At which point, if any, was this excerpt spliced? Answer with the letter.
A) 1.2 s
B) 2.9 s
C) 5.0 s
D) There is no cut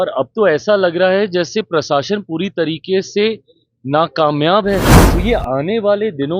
C